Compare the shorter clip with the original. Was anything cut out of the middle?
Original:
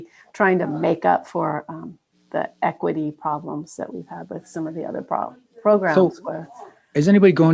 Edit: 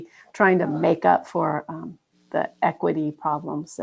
no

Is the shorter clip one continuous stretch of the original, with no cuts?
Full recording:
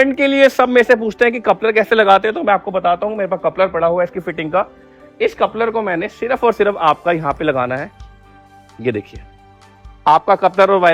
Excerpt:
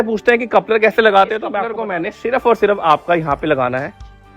no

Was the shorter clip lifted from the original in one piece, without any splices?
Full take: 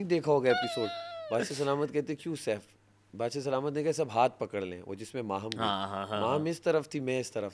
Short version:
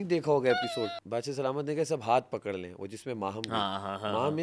no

